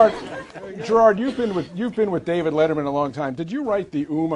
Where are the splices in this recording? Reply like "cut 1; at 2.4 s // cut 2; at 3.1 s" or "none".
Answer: cut 1; at 2.8 s